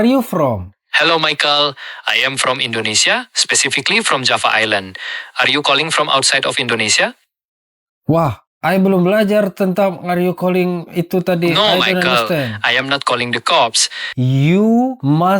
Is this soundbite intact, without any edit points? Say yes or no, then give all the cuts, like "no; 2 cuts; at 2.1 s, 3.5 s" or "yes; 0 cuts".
no; 1 cut; at 14.2 s